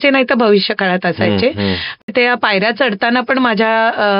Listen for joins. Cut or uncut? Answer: cut